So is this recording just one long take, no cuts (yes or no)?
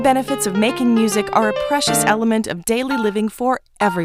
yes